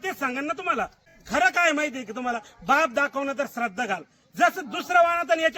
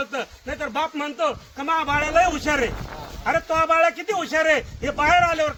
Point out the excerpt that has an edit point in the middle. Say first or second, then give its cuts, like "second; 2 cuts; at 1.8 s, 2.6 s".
first; 1 cut; at 1.2 s